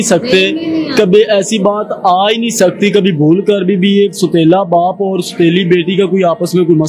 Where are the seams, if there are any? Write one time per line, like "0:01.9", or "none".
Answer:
none